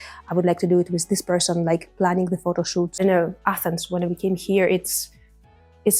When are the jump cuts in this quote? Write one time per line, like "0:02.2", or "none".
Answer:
0:03.3

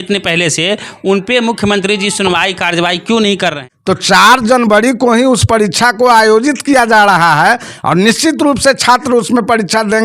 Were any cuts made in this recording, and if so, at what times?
0:03.7

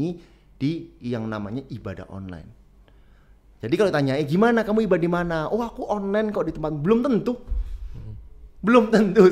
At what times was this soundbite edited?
none

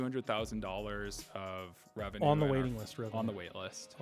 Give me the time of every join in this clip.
0:02.2

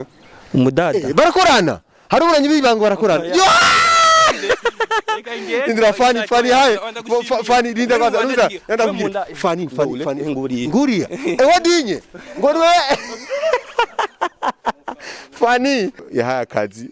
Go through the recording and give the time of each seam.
0:16.0

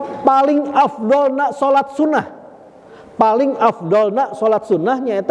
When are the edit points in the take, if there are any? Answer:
none

